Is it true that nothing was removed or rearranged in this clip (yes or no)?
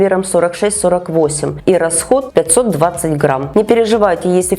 no